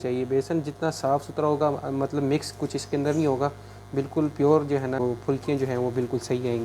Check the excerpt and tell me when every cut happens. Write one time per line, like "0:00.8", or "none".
0:05.0